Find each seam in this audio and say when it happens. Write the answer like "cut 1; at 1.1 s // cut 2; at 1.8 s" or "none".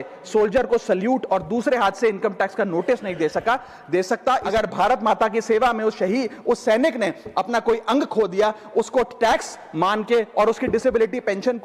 cut 1; at 4.5 s